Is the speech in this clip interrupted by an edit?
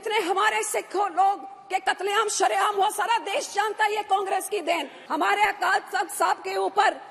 yes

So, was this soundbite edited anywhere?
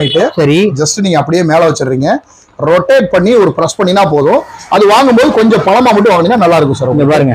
no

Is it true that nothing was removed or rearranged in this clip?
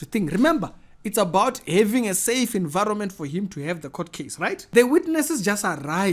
no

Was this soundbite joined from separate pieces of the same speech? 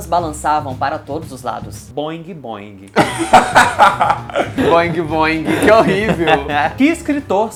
no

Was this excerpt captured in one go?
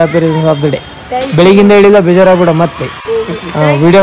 yes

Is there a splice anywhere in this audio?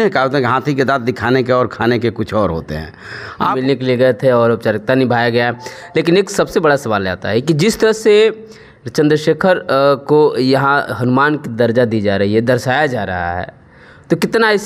yes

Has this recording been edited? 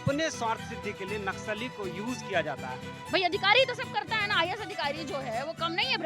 yes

